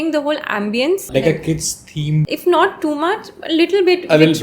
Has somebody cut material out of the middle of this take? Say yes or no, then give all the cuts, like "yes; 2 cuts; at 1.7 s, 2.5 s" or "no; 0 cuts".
yes; 2 cuts; at 1.1 s, 2.3 s